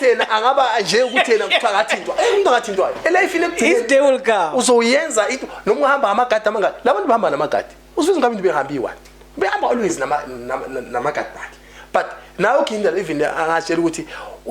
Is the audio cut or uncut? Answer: uncut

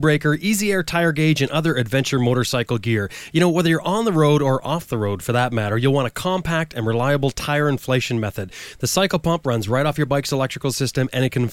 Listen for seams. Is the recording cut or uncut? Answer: uncut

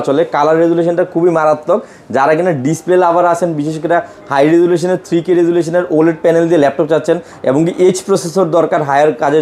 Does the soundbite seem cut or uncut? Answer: uncut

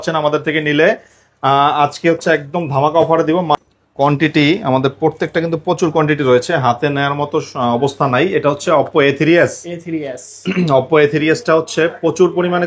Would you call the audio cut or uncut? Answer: cut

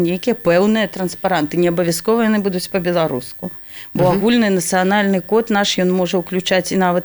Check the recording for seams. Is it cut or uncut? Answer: uncut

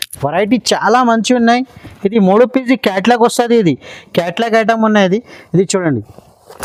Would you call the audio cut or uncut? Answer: uncut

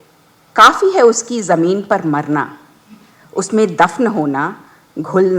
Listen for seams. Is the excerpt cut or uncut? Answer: uncut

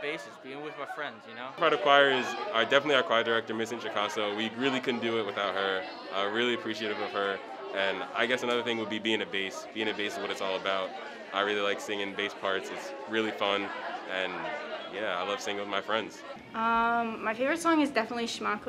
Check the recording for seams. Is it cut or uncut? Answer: cut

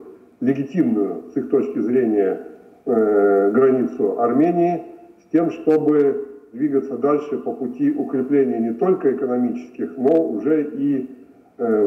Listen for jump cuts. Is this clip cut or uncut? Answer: uncut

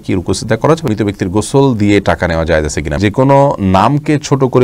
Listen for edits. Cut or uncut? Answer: cut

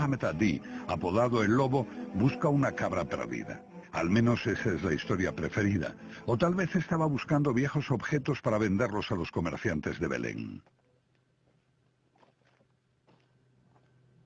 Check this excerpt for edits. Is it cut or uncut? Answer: cut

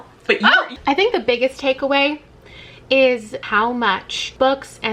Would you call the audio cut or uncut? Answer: cut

